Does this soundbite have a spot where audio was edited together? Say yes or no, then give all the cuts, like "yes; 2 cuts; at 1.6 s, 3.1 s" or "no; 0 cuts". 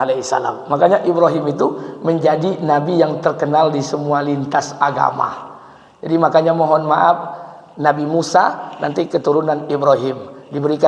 no; 0 cuts